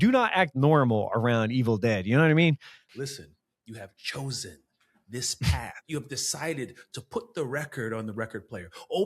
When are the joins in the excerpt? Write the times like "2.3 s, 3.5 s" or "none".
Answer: 2.7 s

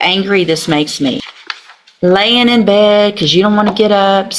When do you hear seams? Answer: 1.4 s

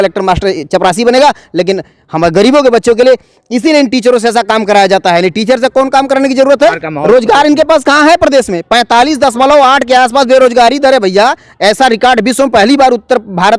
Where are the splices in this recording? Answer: 6.9 s

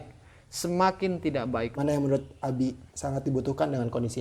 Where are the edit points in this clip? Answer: 1.7 s, 2.9 s

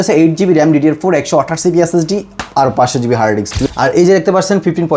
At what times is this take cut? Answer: 3.6 s

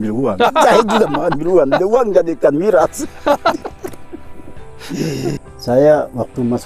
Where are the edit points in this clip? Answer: 5.4 s

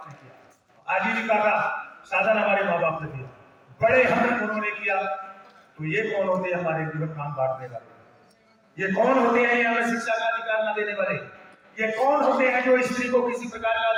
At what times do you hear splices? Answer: none

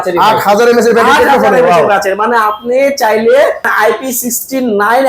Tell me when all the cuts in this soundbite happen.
3.7 s

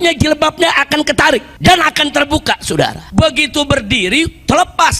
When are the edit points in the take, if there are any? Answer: 1.5 s, 3.0 s

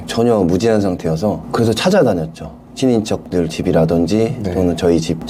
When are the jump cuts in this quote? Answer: none

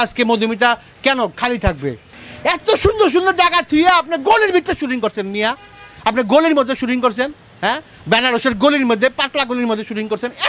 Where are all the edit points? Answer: 2.1 s

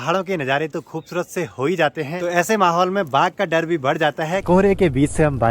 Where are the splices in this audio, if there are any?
2.2 s, 4.4 s

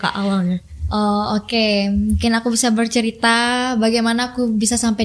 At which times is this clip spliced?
none

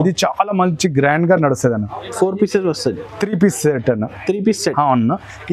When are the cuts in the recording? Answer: none

